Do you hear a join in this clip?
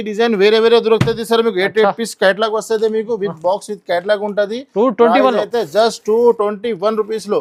no; 0 cuts

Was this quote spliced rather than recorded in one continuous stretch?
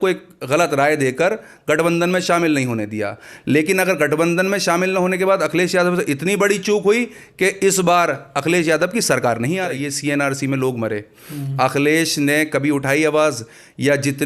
yes; 1 cut; at 9.8 s

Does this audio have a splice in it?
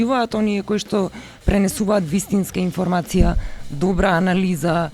no; 0 cuts

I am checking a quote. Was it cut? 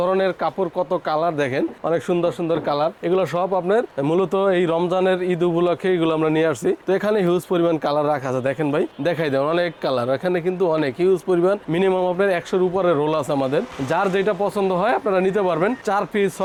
no; 0 cuts

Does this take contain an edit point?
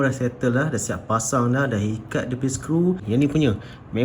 yes; 1 cut; at 3.0 s

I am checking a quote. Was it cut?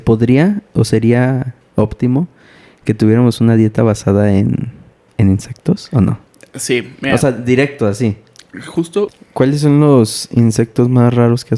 yes; 1 cut; at 9.2 s

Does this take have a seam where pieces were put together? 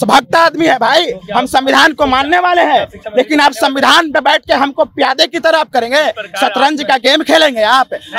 no; 0 cuts

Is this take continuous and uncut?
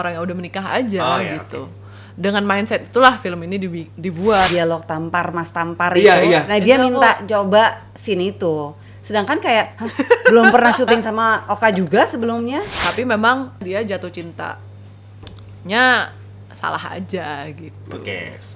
no; 2 cuts; at 4.5 s, 12.7 s

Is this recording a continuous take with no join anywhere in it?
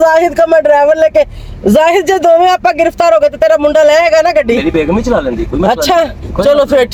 yes; 0 cuts

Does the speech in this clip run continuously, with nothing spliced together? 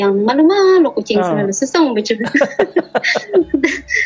yes; 0 cuts

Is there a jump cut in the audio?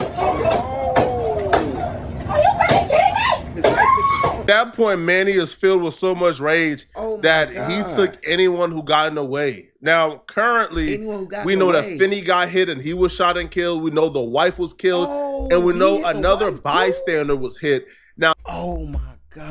yes; 1 cut; at 18.3 s

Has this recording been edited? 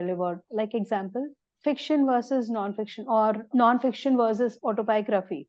yes; 1 cut; at 1.4 s

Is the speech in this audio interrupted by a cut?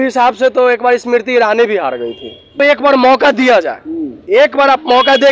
yes; 1 cut; at 2.6 s

